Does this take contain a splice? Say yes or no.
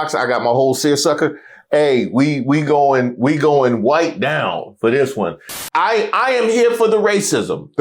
yes